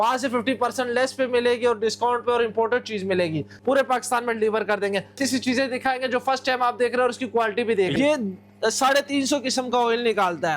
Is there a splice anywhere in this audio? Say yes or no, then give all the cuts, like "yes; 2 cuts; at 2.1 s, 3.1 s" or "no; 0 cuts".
yes; 3 cuts; at 3.5 s, 5.2 s, 7.9 s